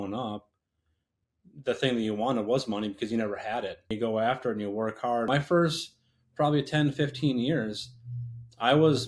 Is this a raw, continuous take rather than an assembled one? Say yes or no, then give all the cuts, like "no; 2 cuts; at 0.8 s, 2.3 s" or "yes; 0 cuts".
no; 2 cuts; at 3.9 s, 5.3 s